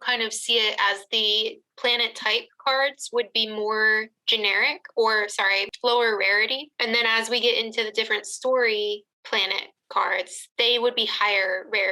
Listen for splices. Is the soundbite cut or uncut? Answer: uncut